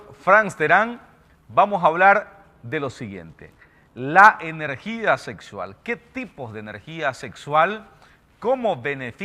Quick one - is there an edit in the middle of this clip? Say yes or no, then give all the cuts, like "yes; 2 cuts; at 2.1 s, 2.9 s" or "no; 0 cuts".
yes; 1 cut; at 6.3 s